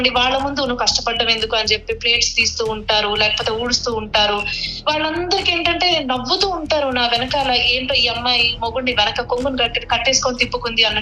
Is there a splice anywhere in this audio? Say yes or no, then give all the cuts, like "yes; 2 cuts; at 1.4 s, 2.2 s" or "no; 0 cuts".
no; 0 cuts